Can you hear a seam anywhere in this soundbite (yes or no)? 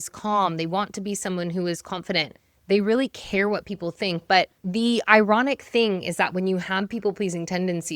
yes